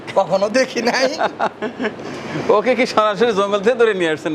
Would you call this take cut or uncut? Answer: uncut